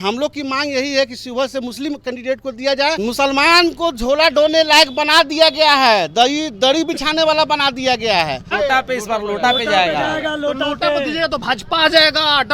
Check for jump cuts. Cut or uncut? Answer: cut